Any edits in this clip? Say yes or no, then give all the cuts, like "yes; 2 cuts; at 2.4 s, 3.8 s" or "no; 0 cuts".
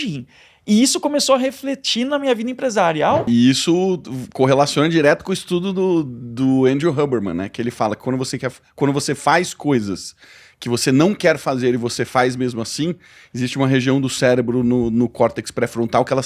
yes; 1 cut; at 3.3 s